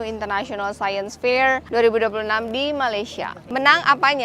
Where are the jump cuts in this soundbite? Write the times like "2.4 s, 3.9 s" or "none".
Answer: 1.6 s, 3.4 s